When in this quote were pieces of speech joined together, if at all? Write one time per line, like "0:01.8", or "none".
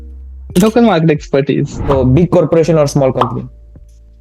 0:01.8